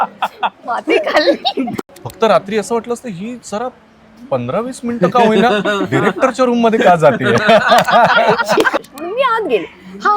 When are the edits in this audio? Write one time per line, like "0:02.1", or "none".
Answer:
0:01.7
0:08.7

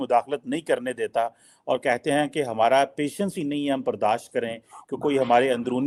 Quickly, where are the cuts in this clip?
none

